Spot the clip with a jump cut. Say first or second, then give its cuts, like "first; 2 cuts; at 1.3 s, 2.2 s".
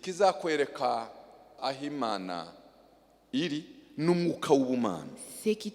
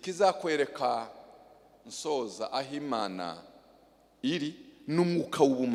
first; 1 cut; at 1.6 s